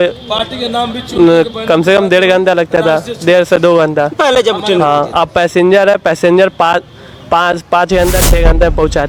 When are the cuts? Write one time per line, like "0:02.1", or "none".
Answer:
none